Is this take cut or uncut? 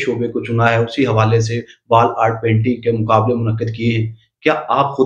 uncut